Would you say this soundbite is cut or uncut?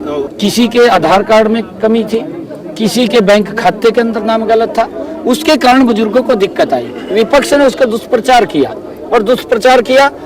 uncut